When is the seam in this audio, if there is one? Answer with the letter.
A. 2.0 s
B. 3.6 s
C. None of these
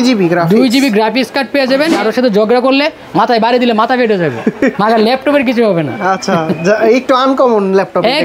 A